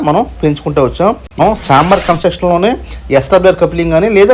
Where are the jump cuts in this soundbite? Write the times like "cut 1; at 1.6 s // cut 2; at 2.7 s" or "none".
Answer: cut 1; at 1.4 s

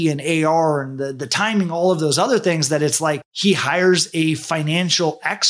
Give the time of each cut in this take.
none

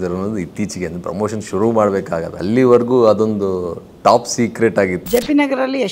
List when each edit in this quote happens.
cut 1; at 2.3 s // cut 2; at 5.0 s

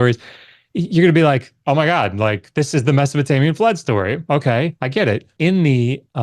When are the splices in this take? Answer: cut 1; at 2.5 s // cut 2; at 5.3 s

